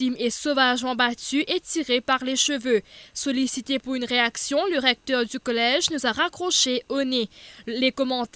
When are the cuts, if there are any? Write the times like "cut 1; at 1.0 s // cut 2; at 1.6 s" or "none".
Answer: cut 1; at 2.9 s